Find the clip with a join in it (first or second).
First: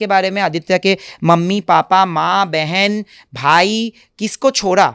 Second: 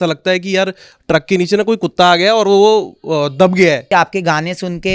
second